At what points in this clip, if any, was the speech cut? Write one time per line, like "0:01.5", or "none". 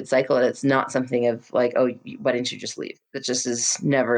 none

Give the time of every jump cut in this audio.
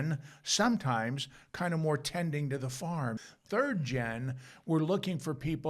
0:03.2

